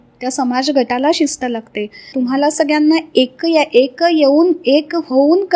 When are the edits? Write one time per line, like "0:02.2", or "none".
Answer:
0:02.0